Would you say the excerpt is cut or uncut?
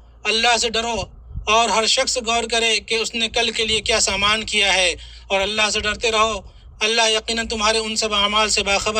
uncut